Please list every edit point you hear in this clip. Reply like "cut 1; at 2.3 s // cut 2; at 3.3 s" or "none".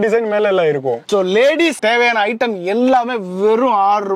cut 1; at 1.0 s

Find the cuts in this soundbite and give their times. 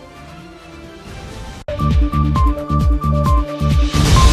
cut 1; at 1.2 s

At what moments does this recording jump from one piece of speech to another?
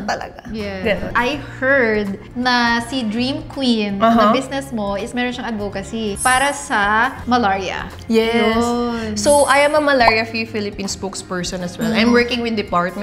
none

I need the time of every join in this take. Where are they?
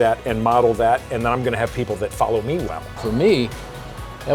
cut 1; at 2.9 s

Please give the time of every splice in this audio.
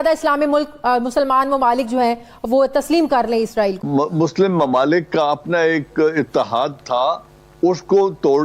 cut 1; at 3.8 s

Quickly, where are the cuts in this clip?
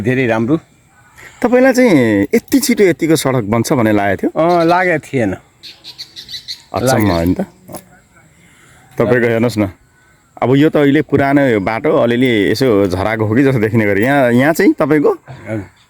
none

